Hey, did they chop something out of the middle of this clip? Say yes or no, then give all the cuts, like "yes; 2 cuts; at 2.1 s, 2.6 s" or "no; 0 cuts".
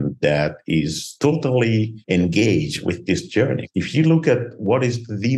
yes; 3 cuts; at 1.0 s, 2.0 s, 3.2 s